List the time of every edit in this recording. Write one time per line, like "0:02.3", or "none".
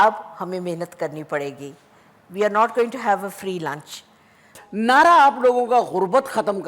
0:04.5